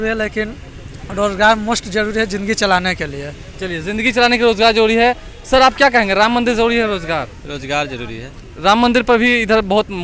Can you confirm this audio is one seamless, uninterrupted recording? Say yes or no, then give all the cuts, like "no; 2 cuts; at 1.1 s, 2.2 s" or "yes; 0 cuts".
yes; 0 cuts